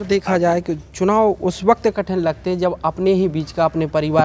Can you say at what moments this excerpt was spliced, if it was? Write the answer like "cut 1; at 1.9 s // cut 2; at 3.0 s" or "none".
none